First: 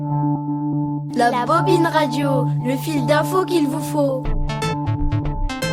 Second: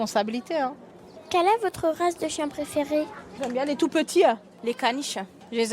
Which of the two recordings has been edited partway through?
second; 3 cuts; at 0.9 s, 3.1 s, 4.8 s

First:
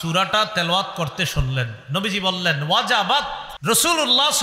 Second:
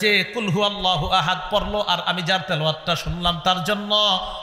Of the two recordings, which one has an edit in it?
first; 1 cut; at 3.5 s

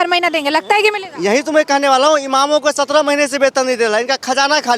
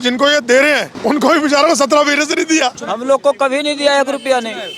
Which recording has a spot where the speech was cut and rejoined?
second; 2 cuts; at 0.9 s, 2.9 s

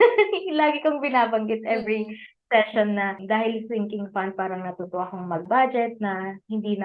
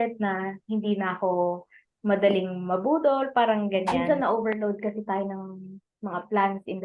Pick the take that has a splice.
second; 1 cut; at 3.9 s

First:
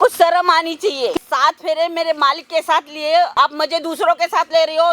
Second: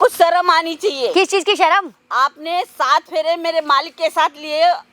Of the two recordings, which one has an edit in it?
first; 2 cuts; at 1.2 s, 3.3 s

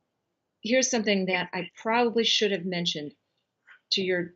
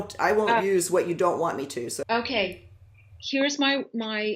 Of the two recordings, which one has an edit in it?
second; 1 cut; at 2.0 s

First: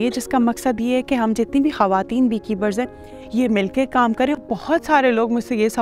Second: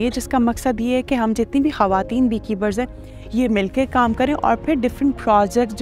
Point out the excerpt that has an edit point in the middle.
first; 1 cut; at 4.4 s

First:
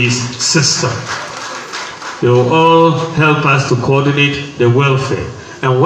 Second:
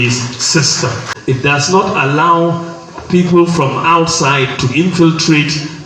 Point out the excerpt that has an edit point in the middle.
second; 1 cut; at 1.4 s

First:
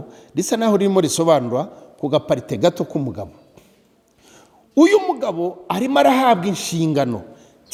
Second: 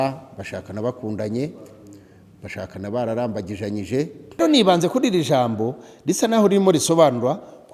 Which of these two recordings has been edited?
second; 1 cut; at 4.4 s

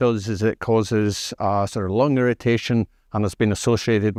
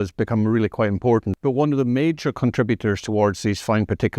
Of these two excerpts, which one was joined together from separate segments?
second; 1 cut; at 1.3 s

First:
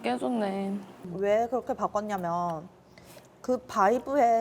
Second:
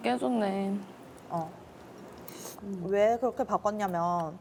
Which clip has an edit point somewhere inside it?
first; 1 cut; at 1.0 s

